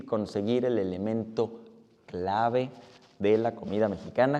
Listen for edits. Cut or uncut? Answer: uncut